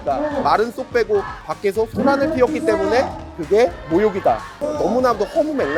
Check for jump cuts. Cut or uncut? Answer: cut